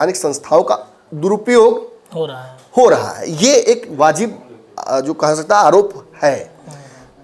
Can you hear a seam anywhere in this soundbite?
no; 0 cuts

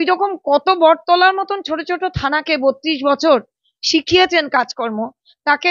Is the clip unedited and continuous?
yes; 0 cuts

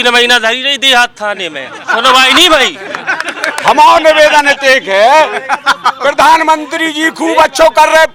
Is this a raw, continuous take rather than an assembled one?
yes; 0 cuts

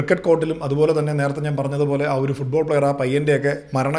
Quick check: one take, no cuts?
yes; 0 cuts

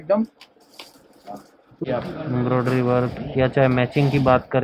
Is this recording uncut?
no; 1 cut; at 1.8 s

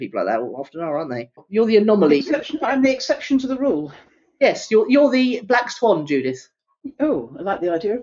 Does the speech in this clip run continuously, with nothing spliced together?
no; 1 cut; at 1.3 s

